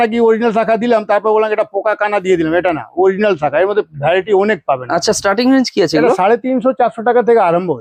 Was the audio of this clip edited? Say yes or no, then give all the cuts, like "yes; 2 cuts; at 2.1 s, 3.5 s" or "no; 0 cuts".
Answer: no; 0 cuts